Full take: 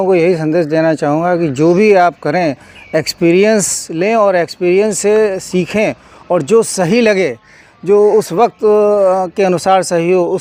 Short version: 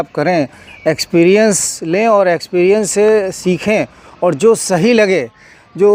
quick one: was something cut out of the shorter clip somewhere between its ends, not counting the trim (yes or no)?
no